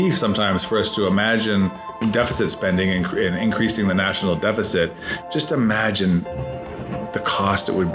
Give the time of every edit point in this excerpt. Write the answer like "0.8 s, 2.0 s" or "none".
2.0 s